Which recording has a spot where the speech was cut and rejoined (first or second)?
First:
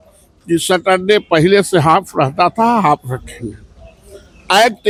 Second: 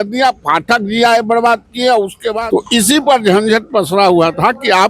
second